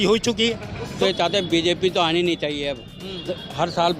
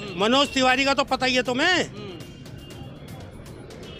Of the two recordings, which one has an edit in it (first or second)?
first